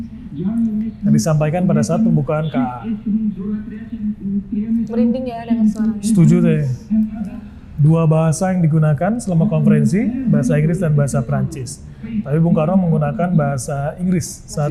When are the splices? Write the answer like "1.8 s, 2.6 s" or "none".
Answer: none